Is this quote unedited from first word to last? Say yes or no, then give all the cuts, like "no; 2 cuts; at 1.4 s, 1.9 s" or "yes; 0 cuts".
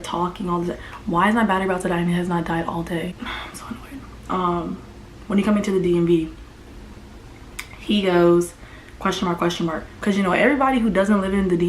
yes; 0 cuts